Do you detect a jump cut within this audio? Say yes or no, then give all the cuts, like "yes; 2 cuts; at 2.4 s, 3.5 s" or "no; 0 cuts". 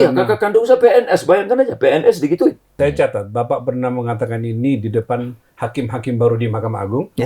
yes; 1 cut; at 2.8 s